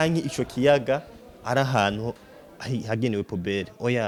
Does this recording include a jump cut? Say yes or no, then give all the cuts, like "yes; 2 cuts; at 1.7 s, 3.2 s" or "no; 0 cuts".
no; 0 cuts